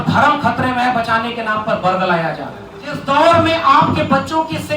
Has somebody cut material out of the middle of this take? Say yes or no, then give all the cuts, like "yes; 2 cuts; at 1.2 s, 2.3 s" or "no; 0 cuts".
yes; 1 cut; at 3.0 s